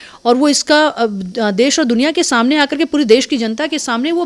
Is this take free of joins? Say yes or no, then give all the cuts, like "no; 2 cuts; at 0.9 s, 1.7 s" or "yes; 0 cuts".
yes; 0 cuts